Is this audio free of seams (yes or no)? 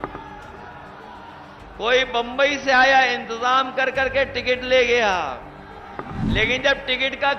no